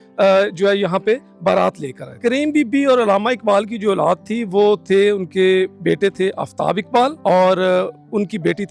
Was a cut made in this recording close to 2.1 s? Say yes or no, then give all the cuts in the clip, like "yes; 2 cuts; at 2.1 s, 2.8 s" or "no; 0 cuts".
yes; 3 cuts; at 2.1 s, 5.8 s, 7.2 s